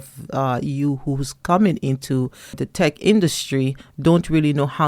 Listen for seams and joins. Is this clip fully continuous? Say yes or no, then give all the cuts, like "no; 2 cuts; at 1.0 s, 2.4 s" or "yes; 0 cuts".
no; 1 cut; at 2.6 s